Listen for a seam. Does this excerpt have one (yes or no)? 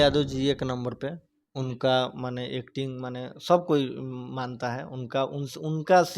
no